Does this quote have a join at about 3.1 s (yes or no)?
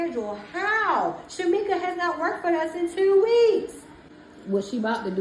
no